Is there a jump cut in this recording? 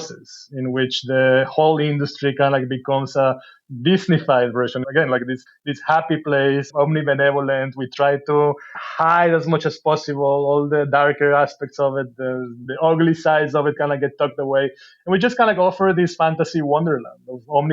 yes; 5 cuts; at 4.8 s, 5.5 s, 6.7 s, 8.8 s, 12.6 s

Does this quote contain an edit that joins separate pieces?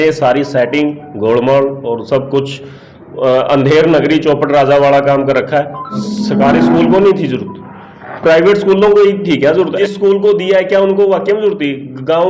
yes; 2 cuts; at 6.0 s, 9.8 s

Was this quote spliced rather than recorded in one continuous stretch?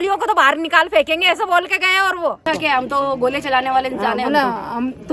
yes; 1 cut; at 2.4 s

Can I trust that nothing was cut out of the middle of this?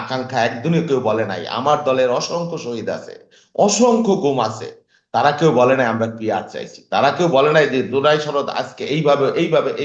yes; 0 cuts

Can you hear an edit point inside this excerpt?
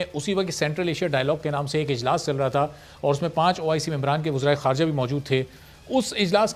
no; 0 cuts

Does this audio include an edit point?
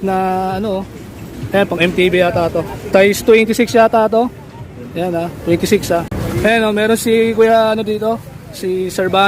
yes; 2 cuts; at 2.8 s, 6.1 s

